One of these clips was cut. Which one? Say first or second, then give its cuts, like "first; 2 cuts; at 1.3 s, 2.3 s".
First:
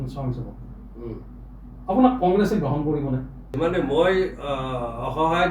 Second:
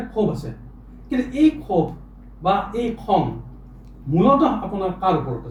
first; 1 cut; at 3.5 s